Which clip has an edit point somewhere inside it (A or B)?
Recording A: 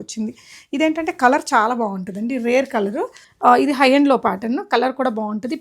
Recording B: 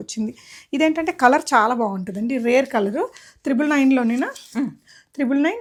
A